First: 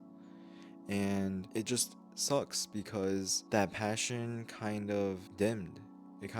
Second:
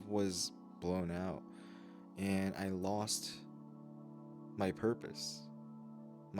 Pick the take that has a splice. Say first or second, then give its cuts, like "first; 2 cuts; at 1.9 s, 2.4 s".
first; 3 cuts; at 1.5 s, 3.4 s, 5.3 s